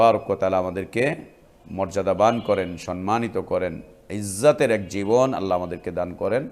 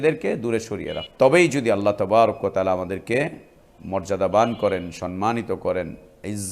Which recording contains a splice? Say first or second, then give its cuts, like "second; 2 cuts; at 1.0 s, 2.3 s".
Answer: second; 1 cut; at 1.0 s